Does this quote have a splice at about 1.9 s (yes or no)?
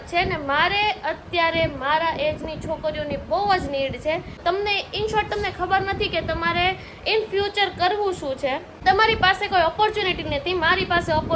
no